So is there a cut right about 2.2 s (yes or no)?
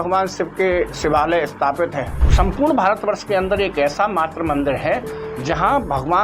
yes